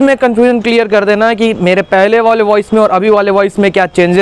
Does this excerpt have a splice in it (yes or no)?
no